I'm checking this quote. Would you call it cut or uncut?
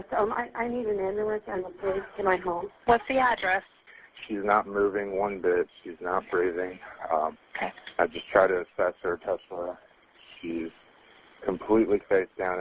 cut